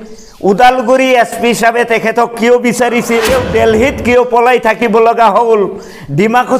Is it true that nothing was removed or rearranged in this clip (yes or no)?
no